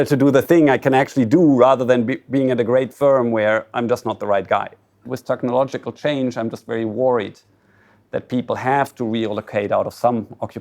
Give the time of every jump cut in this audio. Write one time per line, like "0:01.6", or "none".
0:05.0